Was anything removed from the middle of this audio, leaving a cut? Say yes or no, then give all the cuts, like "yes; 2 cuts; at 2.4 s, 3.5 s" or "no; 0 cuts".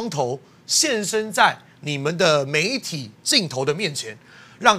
no; 0 cuts